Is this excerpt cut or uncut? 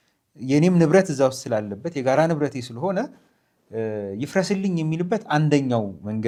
uncut